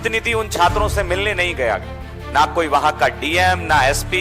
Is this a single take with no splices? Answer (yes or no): yes